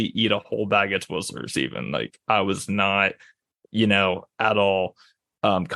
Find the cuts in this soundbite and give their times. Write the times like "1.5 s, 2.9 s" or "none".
none